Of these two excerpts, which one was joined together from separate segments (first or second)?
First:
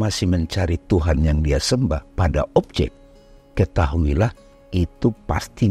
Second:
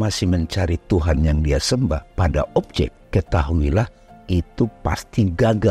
second